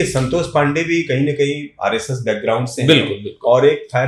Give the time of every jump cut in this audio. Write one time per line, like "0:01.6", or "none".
none